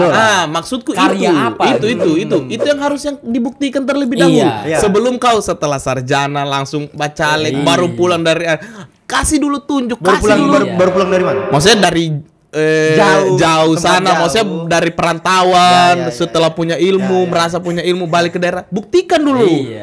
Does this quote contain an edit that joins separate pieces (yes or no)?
no